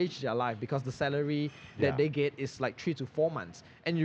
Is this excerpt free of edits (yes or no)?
yes